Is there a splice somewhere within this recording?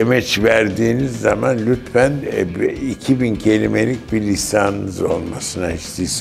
no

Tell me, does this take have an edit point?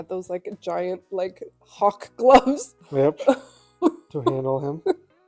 no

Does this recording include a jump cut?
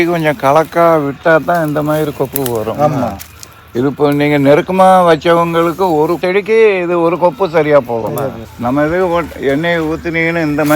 yes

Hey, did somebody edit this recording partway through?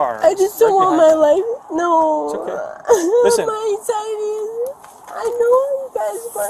no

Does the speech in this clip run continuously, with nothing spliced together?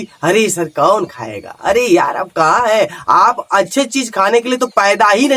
yes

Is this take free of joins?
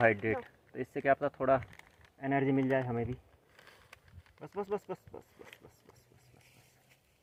yes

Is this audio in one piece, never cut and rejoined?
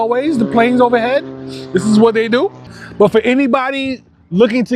yes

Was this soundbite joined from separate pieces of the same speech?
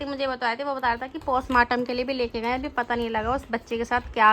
no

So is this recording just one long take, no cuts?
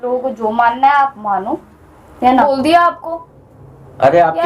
no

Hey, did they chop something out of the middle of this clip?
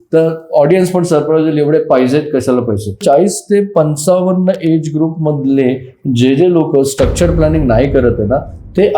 yes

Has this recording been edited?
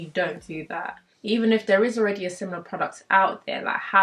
yes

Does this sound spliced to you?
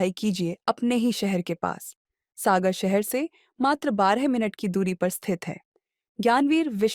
no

